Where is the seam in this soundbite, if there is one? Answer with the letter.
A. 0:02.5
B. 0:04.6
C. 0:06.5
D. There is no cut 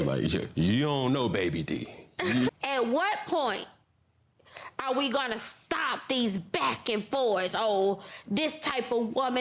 A